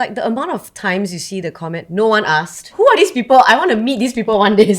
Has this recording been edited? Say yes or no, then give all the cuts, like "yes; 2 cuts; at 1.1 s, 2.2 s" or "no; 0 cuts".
yes; 1 cut; at 2.7 s